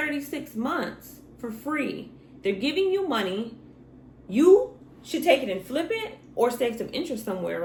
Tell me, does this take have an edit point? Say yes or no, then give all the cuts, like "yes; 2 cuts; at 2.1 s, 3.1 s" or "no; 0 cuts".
no; 0 cuts